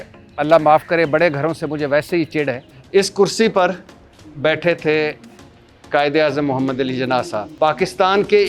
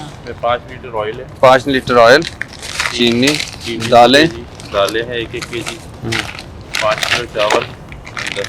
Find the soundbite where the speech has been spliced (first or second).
first